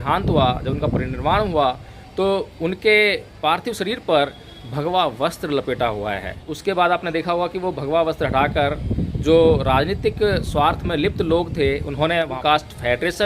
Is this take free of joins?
no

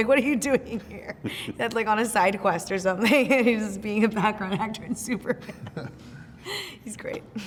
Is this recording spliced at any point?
no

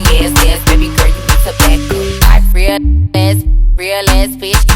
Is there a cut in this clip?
no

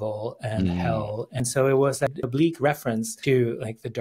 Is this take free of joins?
no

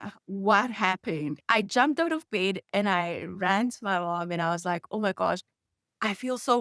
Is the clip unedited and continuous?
no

